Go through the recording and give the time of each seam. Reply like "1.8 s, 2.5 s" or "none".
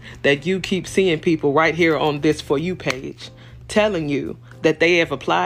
none